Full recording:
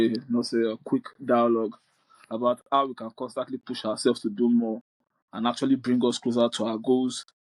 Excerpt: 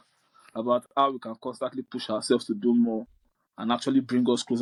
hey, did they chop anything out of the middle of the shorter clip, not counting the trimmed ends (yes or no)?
no